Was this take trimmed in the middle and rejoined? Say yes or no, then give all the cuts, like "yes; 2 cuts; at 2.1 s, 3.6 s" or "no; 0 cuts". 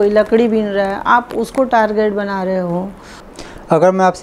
yes; 1 cut; at 3.2 s